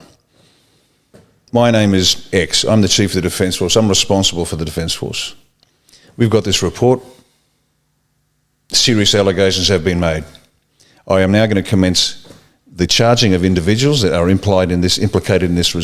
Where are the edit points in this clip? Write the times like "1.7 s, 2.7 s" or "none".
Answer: none